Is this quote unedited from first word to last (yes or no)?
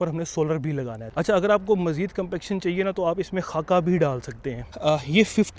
no